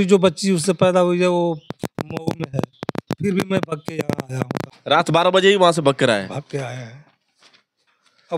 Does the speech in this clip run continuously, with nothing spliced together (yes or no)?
no